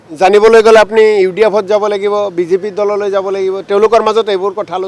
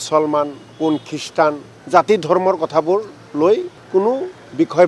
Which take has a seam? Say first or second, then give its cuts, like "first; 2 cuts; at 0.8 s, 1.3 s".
second; 2 cuts; at 1.7 s, 3.8 s